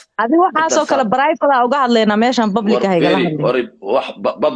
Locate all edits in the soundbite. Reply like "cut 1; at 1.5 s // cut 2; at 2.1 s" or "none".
none